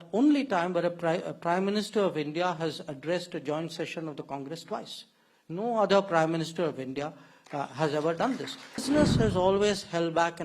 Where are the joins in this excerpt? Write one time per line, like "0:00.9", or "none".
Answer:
0:08.8